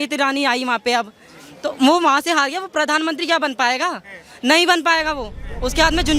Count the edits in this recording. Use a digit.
0